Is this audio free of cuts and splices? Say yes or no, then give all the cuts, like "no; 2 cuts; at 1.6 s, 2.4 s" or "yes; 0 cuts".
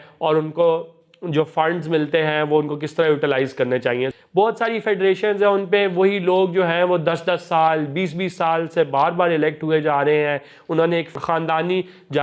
no; 2 cuts; at 4.1 s, 11.1 s